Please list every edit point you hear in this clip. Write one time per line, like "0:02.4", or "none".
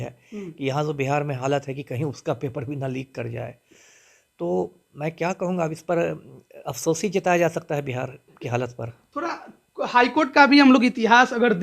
none